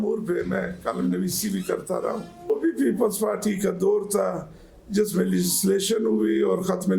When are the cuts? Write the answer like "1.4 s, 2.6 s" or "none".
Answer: 2.5 s

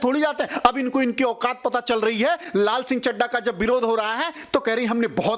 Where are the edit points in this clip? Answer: none

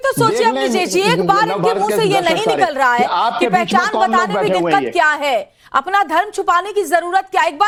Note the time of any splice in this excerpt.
none

